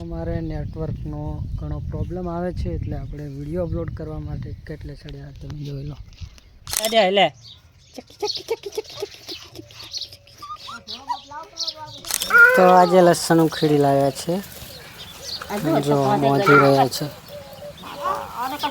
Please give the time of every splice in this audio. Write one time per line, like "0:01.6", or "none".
0:06.6
0:12.0